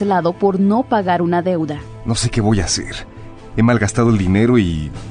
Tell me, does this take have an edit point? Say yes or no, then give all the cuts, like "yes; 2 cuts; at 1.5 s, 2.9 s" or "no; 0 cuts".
no; 0 cuts